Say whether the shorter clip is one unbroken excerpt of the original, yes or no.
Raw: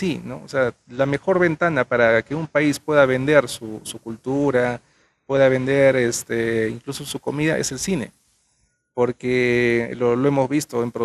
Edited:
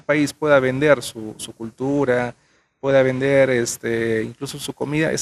yes